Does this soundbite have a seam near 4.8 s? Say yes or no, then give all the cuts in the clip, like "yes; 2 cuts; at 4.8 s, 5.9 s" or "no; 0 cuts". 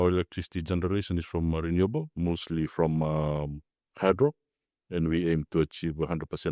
no; 0 cuts